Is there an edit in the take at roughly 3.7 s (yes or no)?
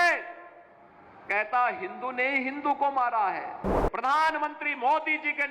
yes